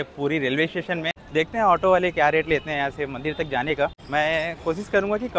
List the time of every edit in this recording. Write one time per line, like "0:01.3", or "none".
0:01.2
0:04.0